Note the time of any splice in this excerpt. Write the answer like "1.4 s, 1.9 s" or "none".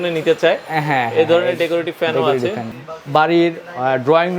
2.7 s